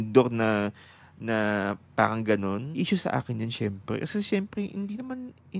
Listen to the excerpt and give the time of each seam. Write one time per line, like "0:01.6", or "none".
0:02.7